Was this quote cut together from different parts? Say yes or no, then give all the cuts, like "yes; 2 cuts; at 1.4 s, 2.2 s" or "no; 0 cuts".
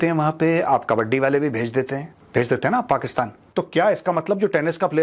yes; 2 cuts; at 2.2 s, 3.4 s